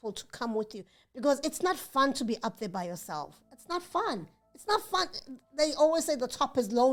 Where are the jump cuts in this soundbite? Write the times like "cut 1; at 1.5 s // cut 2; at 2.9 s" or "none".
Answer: none